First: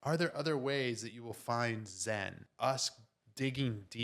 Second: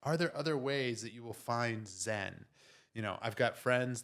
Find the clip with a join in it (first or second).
first